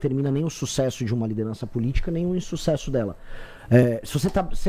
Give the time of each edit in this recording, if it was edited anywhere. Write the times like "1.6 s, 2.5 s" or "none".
none